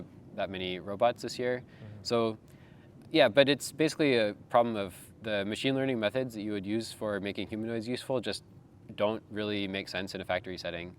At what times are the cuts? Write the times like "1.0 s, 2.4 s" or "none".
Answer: none